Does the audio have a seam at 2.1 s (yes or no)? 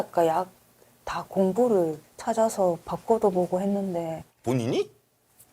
yes